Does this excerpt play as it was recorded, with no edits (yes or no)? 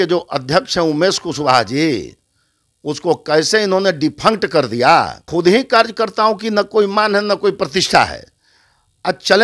no